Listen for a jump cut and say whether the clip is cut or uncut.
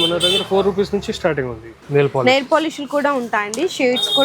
cut